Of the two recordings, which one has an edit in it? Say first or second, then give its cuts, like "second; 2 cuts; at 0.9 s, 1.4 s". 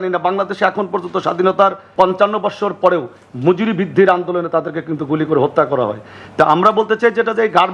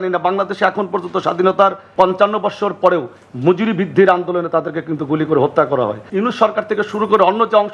second; 1 cut; at 6.0 s